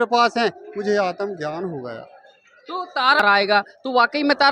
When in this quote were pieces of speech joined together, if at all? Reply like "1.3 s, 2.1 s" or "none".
3.2 s